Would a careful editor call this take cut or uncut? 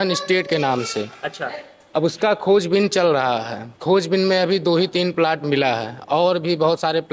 uncut